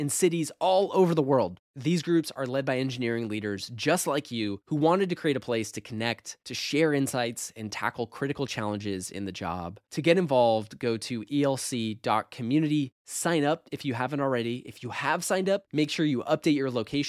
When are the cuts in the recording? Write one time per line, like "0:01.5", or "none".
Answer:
none